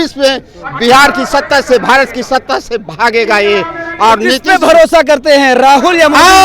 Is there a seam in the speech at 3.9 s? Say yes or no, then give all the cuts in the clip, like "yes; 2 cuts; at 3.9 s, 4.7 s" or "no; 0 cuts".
no; 0 cuts